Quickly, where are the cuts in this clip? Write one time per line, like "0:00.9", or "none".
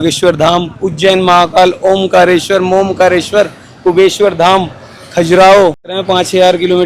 0:05.9